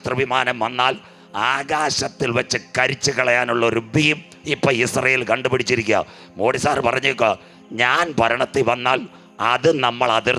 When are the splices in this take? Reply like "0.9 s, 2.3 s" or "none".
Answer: none